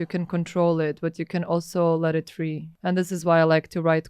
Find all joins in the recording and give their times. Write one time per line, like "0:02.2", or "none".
0:02.7